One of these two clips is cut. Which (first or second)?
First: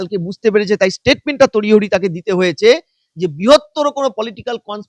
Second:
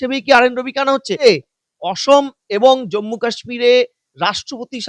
second